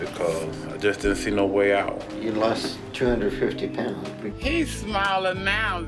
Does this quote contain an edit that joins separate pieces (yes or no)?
no